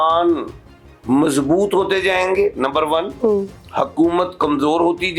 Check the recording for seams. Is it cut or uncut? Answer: uncut